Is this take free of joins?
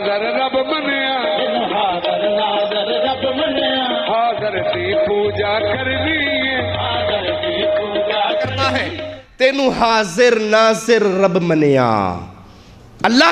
no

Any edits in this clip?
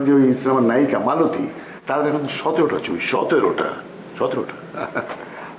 no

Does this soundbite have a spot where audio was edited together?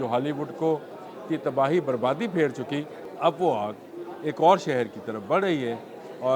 yes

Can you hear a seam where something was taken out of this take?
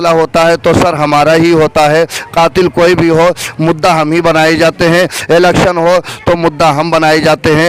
no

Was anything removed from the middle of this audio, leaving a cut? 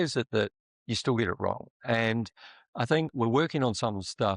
yes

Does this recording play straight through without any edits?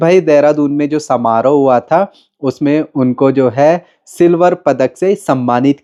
yes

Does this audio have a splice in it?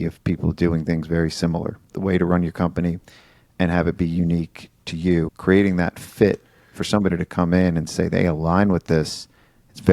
yes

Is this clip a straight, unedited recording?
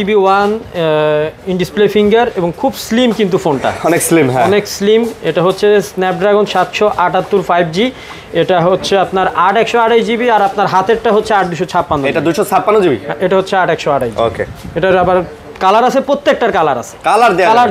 yes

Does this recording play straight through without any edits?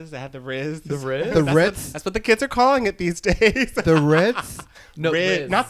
yes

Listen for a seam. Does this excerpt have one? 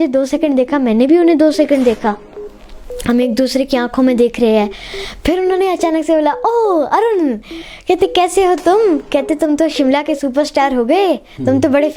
no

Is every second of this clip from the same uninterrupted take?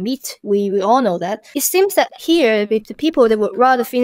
no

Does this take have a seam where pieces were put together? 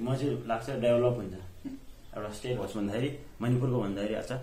yes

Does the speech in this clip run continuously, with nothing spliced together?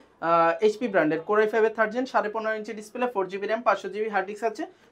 yes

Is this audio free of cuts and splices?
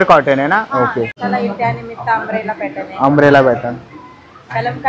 no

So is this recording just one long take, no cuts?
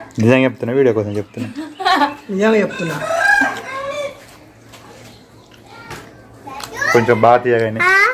no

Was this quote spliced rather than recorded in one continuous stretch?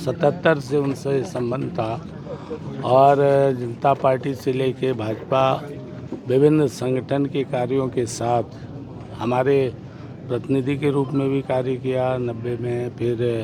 no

